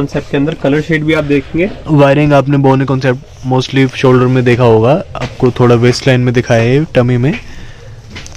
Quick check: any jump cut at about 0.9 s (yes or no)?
no